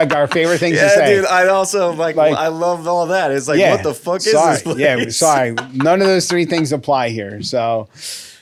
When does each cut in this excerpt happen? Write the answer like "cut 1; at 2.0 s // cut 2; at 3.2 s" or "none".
none